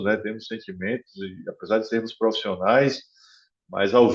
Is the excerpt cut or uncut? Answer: uncut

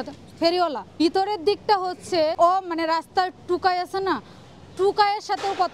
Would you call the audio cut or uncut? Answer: cut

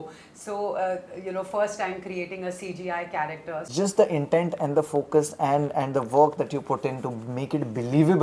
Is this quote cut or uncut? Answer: cut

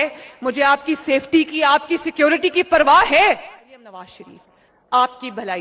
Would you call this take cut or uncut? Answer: cut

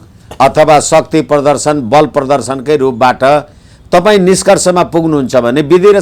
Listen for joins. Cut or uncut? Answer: uncut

